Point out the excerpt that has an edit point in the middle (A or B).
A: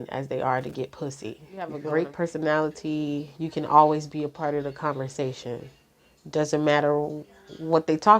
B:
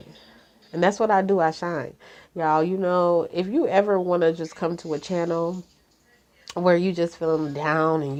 A